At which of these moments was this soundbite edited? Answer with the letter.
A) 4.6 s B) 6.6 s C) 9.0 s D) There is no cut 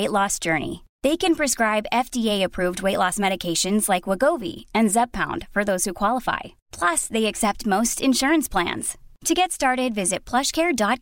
D